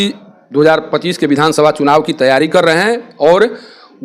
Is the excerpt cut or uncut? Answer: uncut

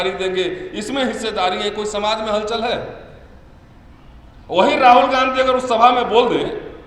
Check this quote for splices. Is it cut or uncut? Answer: uncut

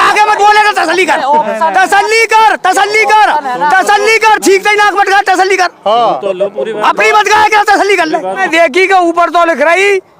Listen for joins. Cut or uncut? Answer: cut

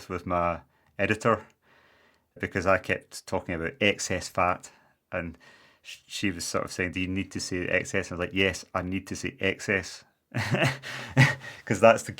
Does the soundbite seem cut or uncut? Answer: cut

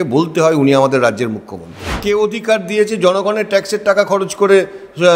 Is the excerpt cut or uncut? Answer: cut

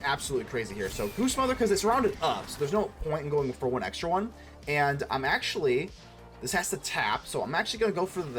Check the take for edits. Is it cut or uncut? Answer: uncut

